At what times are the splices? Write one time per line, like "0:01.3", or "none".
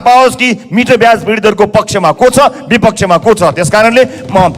none